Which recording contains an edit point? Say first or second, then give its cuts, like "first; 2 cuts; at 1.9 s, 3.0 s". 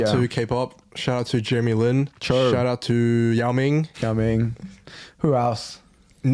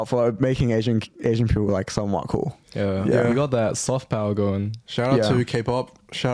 first; 2 cuts; at 2.2 s, 3.9 s